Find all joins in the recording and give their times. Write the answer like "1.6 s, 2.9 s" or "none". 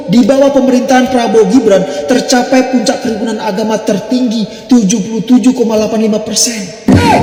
none